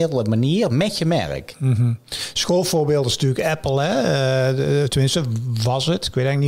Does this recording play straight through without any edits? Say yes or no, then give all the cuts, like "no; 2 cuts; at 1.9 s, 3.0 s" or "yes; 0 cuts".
yes; 0 cuts